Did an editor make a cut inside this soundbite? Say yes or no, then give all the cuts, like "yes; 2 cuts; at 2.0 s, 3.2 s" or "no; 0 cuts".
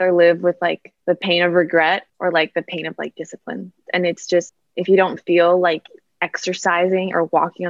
yes; 3 cuts; at 0.9 s, 2.1 s, 4.6 s